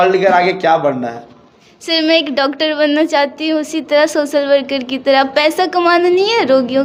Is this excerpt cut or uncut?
uncut